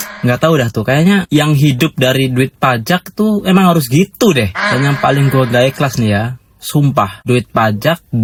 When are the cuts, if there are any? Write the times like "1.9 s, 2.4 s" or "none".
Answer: none